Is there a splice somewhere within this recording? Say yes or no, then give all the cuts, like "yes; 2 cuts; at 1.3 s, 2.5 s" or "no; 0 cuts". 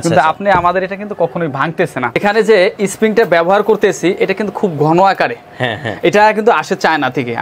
yes; 1 cut; at 2.2 s